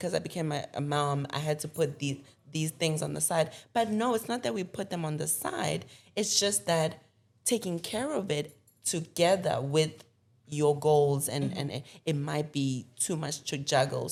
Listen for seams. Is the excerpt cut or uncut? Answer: uncut